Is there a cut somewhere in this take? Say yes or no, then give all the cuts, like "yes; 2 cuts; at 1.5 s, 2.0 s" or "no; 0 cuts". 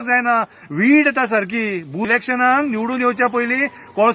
yes; 1 cut; at 2.1 s